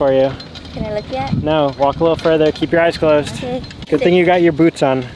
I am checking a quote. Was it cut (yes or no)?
no